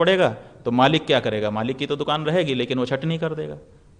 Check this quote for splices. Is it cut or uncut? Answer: uncut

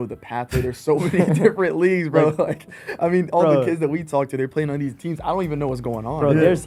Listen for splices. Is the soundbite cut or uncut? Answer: uncut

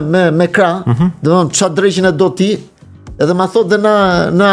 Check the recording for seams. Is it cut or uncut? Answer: uncut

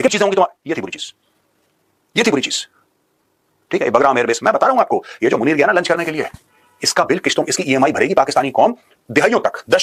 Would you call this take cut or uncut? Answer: uncut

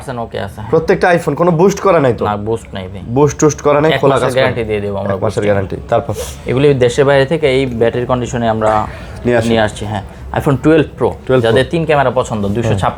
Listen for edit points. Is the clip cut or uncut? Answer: uncut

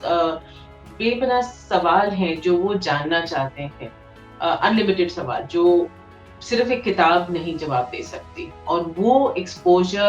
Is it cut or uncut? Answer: uncut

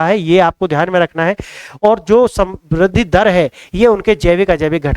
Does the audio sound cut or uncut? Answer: uncut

